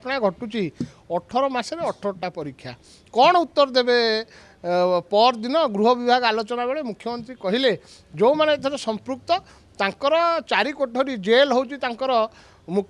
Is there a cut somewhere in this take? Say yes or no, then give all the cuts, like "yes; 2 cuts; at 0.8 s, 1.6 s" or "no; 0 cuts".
no; 0 cuts